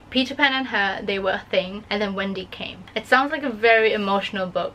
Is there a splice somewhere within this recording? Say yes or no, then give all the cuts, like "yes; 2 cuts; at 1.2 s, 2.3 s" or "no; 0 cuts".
yes; 1 cut; at 2.8 s